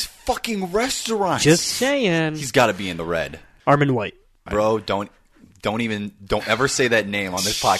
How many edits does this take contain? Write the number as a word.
one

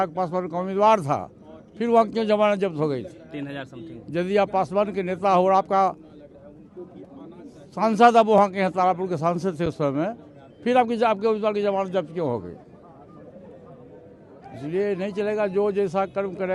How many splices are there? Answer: zero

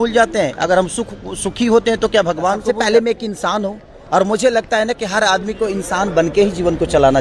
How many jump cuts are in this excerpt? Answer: one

